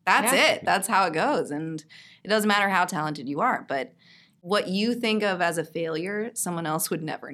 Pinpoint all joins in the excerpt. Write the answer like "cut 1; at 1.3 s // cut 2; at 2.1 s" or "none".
cut 1; at 4.3 s

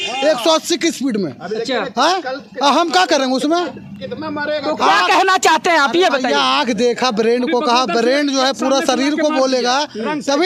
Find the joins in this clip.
none

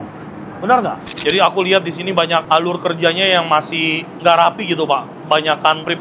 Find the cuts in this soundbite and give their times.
cut 1; at 1.1 s // cut 2; at 2.4 s

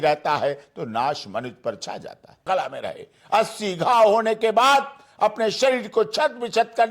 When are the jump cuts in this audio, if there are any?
cut 1; at 2.4 s

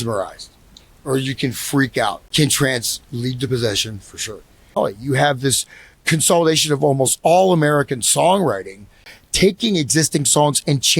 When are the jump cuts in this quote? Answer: cut 1; at 2.2 s // cut 2; at 4.8 s // cut 3; at 9.1 s

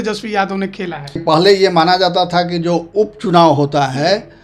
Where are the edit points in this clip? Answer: cut 1; at 1.2 s

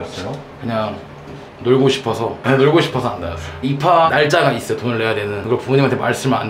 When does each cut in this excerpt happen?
none

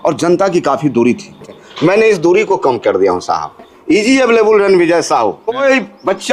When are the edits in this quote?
cut 1; at 1.6 s // cut 2; at 3.7 s // cut 3; at 5.6 s

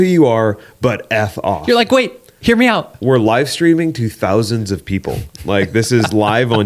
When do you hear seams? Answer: none

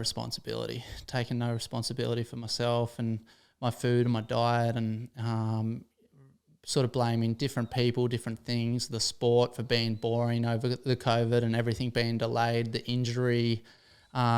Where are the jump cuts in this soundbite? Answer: none

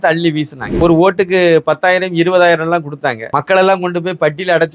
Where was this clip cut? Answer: cut 1; at 0.8 s // cut 2; at 3.2 s

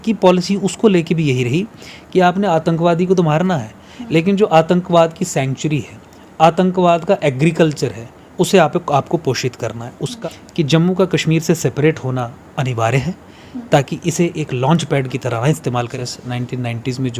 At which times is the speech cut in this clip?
cut 1; at 10.1 s // cut 2; at 15.9 s

